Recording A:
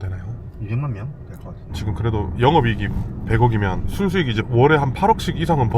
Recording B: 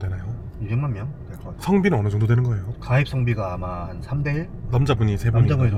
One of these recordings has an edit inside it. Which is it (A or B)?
A